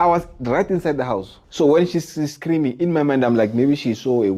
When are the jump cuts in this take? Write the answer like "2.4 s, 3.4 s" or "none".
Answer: 1.4 s